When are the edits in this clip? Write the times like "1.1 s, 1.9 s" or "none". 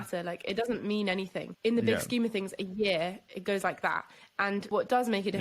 1.5 s, 4.7 s